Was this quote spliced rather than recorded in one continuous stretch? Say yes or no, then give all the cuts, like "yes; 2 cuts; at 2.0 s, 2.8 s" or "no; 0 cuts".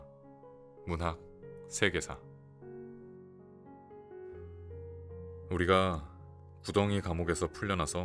yes; 2 cuts; at 2.4 s, 5.5 s